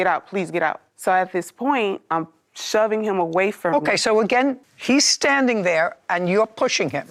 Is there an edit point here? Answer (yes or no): no